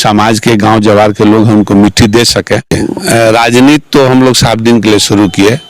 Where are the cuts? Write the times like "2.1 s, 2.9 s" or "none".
2.8 s